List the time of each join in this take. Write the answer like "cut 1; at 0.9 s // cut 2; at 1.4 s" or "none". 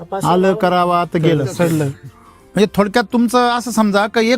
cut 1; at 2.3 s